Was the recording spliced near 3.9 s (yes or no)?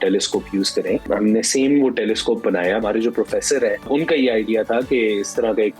yes